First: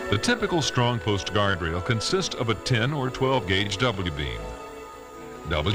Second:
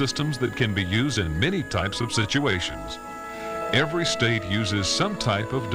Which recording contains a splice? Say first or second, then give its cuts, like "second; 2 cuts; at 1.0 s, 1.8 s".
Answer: second; 1 cut; at 3.9 s